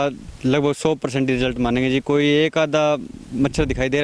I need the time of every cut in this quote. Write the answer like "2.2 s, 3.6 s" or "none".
none